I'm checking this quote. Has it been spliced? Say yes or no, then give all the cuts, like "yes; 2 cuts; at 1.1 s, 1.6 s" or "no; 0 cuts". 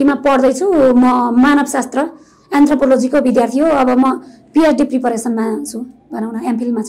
no; 0 cuts